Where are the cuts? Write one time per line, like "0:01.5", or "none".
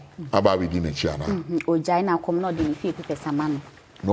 none